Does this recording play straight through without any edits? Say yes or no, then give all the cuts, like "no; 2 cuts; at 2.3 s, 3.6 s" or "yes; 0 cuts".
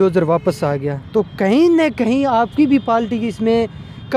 yes; 0 cuts